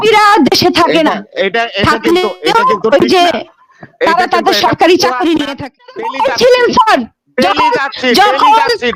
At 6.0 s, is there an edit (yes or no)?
yes